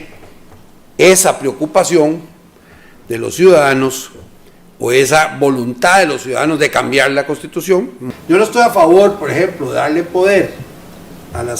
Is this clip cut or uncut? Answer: cut